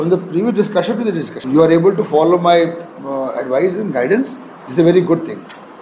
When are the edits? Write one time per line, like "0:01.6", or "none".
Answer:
0:01.4